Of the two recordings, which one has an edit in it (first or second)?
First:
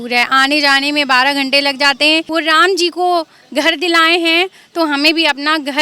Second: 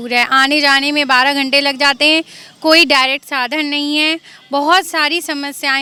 first